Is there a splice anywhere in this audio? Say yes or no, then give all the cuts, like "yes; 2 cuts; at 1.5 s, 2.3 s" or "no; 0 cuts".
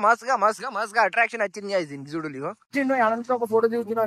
yes; 1 cut; at 2.7 s